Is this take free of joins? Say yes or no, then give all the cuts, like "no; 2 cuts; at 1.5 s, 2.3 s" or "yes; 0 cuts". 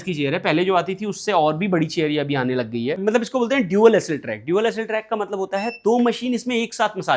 no; 1 cut; at 3.0 s